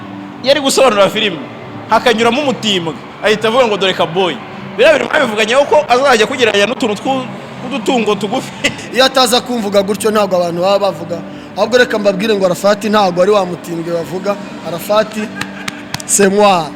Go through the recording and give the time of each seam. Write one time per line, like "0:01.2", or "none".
0:08.8